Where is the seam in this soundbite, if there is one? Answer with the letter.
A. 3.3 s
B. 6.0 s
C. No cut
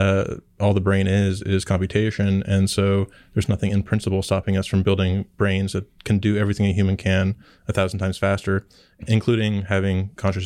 C